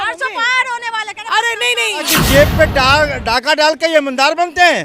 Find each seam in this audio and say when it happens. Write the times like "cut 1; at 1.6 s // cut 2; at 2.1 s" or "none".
cut 1; at 2.2 s